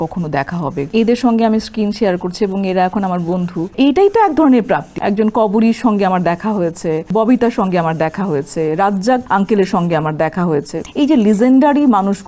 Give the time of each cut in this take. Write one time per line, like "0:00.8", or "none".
0:00.9
0:03.7
0:04.9
0:07.1
0:09.2
0:10.8